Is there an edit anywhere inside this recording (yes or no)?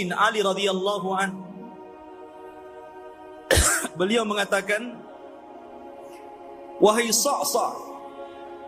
no